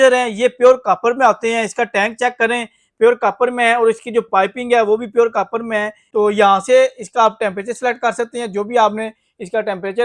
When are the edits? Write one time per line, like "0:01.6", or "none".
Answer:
0:06.0